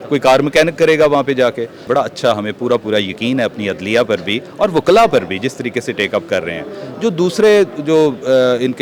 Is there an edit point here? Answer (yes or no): yes